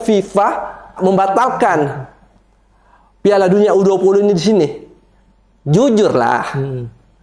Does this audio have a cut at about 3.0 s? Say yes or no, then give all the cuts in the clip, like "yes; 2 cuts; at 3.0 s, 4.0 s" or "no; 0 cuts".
no; 1 cut; at 0.9 s